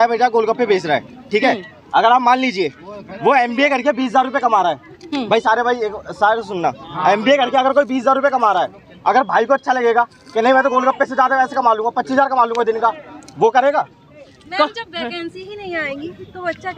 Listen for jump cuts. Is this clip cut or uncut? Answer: uncut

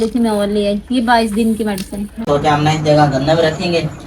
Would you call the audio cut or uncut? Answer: cut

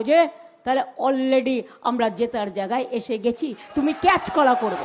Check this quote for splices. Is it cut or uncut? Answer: uncut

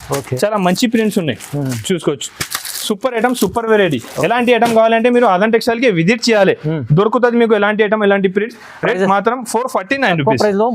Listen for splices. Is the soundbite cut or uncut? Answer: uncut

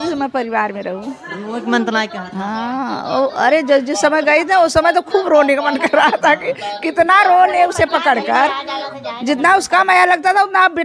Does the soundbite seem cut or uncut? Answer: uncut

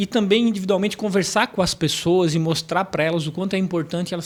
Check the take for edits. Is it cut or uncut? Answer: uncut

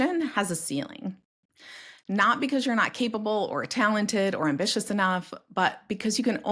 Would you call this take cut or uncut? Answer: uncut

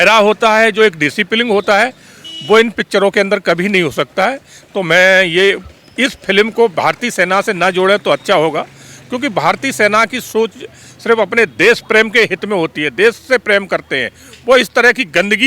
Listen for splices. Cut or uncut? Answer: uncut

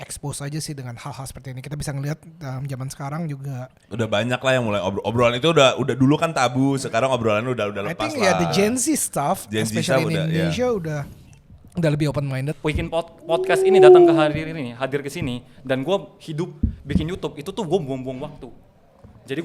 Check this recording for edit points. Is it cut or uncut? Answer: cut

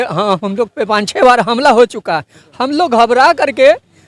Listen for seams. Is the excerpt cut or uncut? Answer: uncut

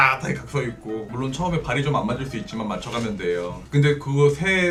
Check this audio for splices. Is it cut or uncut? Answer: uncut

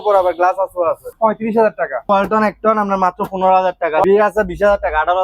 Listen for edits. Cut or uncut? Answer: cut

